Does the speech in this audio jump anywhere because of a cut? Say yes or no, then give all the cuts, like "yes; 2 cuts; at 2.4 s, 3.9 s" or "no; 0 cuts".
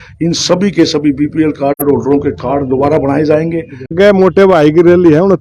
yes; 1 cut; at 3.9 s